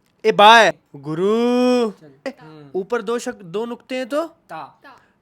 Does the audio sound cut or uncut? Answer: cut